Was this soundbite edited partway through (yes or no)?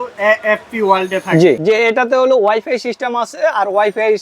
no